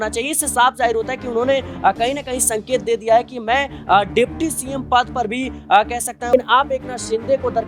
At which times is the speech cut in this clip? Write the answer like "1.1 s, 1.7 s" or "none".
6.3 s